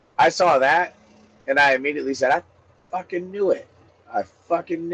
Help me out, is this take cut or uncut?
uncut